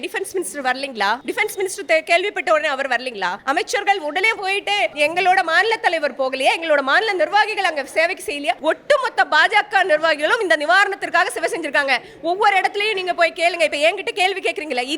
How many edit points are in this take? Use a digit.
4